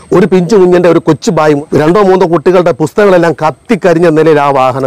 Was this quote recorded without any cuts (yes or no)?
no